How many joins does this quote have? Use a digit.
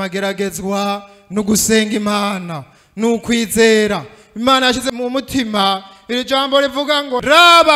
1